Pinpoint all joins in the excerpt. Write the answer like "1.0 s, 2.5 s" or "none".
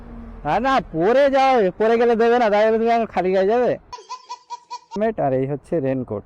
5.0 s